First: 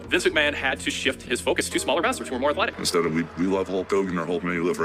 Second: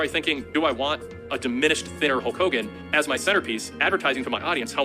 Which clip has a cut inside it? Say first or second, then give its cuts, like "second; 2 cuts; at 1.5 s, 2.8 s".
first; 1 cut; at 2.8 s